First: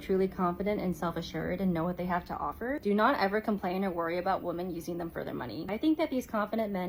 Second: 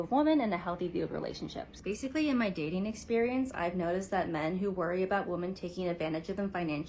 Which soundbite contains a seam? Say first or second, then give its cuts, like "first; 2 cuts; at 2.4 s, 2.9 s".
second; 2 cuts; at 1.8 s, 6.0 s